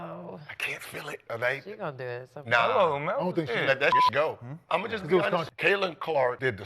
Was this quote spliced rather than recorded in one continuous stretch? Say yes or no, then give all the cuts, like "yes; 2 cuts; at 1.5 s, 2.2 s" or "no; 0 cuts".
yes; 1 cut; at 1.2 s